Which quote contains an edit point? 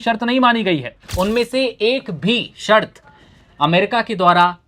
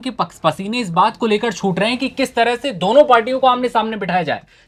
first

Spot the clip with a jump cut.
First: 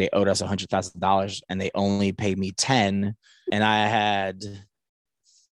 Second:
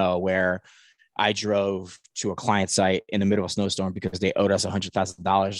first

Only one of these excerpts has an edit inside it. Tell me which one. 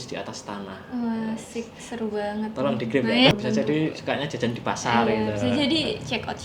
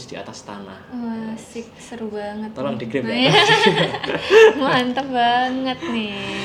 first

